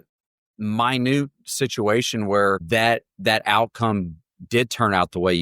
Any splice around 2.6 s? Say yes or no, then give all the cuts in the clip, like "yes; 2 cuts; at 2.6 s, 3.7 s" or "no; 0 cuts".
yes; 1 cut; at 2.6 s